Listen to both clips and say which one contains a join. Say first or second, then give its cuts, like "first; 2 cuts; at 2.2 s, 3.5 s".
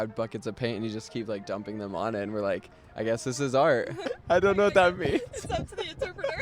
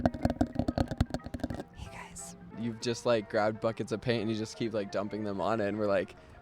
second; 1 cut; at 2.5 s